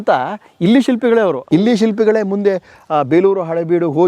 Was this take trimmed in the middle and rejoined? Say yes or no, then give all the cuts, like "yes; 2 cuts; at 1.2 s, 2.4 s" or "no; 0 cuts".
yes; 1 cut; at 1.4 s